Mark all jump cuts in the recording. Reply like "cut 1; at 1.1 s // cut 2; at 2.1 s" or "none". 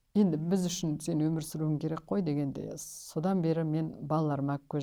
none